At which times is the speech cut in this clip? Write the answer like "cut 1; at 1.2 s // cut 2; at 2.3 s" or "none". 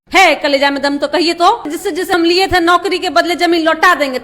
cut 1; at 2.1 s